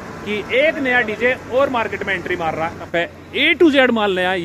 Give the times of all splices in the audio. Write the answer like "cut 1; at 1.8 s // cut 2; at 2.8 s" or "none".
cut 1; at 2.9 s